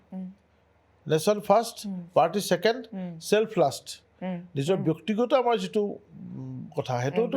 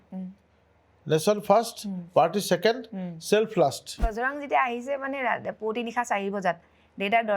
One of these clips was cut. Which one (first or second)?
second